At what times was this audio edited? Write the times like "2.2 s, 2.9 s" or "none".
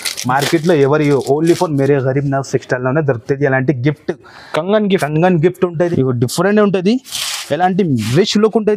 5.9 s